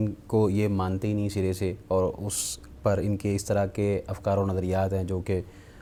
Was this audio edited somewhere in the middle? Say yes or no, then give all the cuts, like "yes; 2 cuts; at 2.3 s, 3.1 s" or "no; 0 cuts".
no; 0 cuts